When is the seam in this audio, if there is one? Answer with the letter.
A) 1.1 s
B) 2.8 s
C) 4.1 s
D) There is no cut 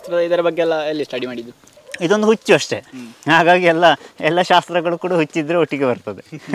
D